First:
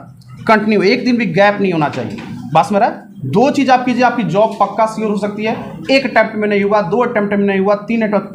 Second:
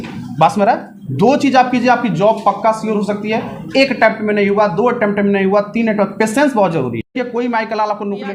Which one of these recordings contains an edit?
second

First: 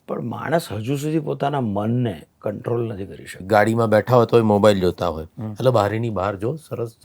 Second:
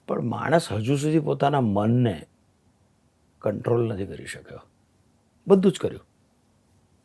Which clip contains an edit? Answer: first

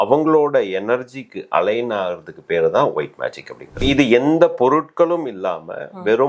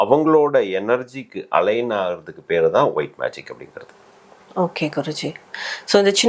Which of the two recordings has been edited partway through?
first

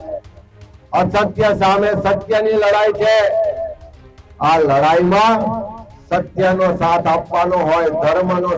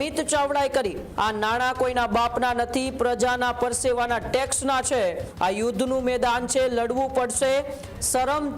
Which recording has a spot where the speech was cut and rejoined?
second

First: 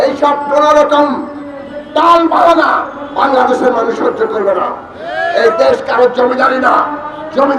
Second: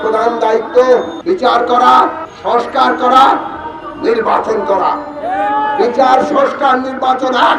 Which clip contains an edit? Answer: second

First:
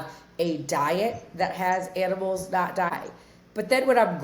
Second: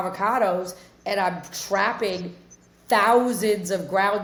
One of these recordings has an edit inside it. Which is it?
first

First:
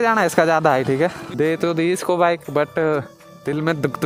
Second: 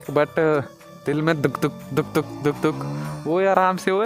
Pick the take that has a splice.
first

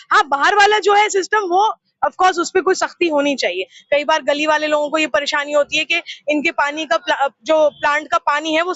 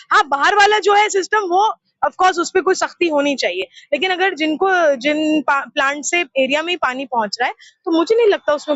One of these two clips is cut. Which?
first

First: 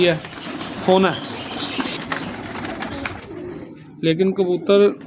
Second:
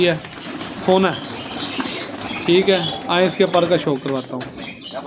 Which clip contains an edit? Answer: first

